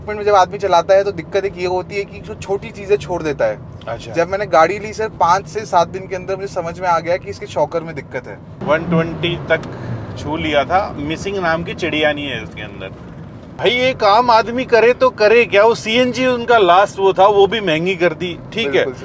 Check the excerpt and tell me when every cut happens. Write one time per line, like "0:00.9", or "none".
0:08.6
0:13.4